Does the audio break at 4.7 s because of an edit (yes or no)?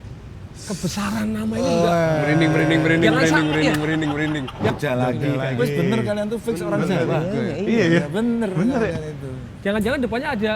yes